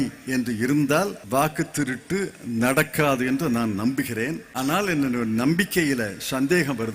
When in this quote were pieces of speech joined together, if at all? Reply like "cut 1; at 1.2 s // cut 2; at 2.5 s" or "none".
cut 1; at 1.2 s // cut 2; at 4.4 s